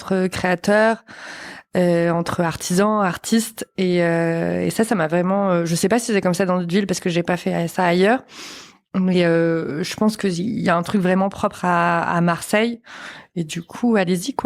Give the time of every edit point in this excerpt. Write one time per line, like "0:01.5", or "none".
none